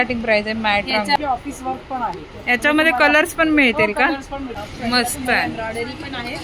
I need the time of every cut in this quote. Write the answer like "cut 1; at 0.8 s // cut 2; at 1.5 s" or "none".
cut 1; at 1.2 s // cut 2; at 4.6 s